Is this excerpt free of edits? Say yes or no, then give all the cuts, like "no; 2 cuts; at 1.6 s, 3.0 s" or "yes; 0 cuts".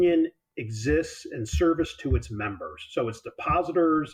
yes; 0 cuts